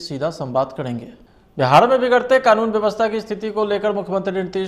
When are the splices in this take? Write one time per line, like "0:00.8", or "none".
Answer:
0:01.5